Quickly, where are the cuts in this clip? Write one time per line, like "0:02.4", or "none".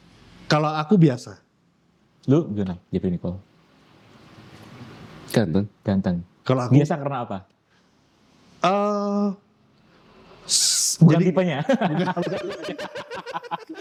none